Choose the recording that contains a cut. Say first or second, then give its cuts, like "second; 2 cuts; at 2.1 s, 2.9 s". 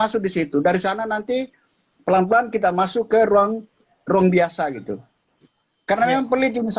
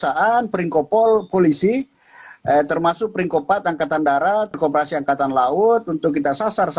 second; 1 cut; at 4.6 s